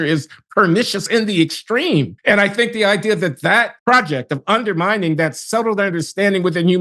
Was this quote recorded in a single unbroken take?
no; 2 cuts; at 2.1 s, 3.7 s

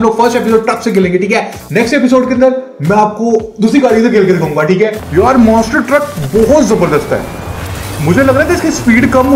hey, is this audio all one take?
no; 2 cuts; at 1.6 s, 5.0 s

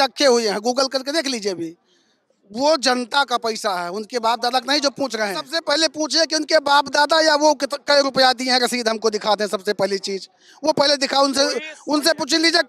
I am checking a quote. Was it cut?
yes; 1 cut; at 5.5 s

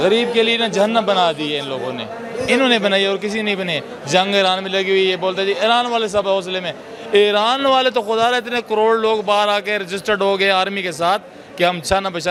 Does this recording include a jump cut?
no; 0 cuts

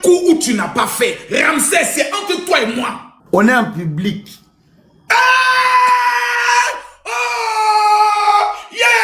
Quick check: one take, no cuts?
no; 1 cut; at 3.1 s

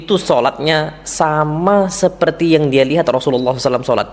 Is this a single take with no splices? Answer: yes; 0 cuts

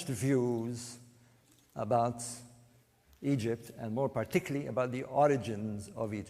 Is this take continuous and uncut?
no; 1 cut; at 3.7 s

